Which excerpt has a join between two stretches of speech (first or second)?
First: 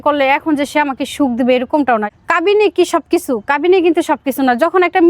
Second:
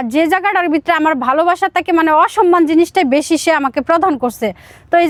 first